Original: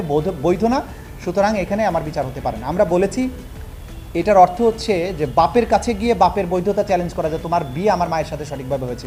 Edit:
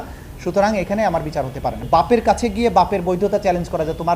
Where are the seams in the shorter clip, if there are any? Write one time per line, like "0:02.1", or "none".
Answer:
0:01.8

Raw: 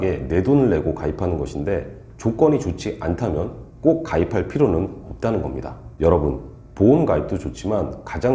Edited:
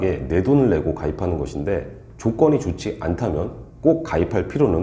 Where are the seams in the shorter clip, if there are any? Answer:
none

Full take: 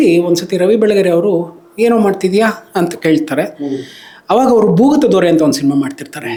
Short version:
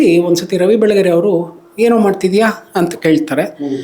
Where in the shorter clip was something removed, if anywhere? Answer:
none

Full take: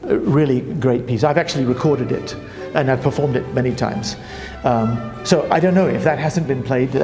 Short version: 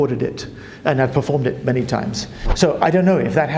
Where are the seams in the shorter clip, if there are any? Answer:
0:02.4

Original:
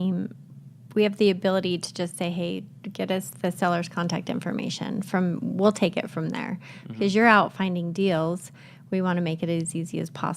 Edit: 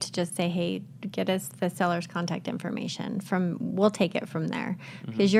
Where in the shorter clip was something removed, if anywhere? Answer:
none

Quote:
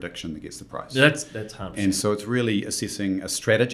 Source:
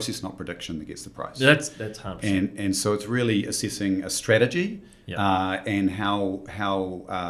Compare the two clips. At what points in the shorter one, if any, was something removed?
0:01.7

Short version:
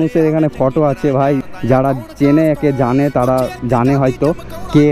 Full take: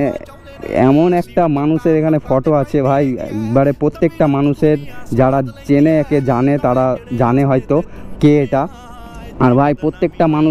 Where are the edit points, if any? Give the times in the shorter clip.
0:01.5

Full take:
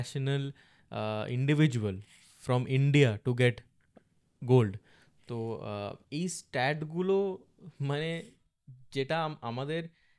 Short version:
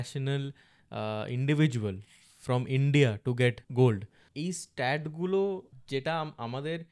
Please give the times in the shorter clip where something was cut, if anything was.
0:03.6
0:04.2
0:05.7

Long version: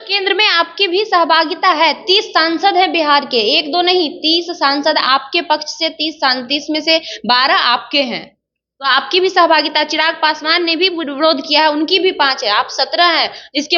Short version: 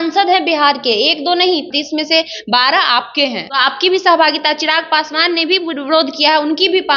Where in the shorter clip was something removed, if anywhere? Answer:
0:01.7
0:03.4

